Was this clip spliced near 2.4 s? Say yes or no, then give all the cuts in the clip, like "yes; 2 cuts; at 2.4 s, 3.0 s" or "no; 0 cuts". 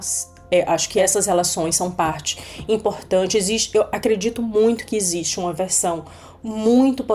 no; 1 cut; at 1.0 s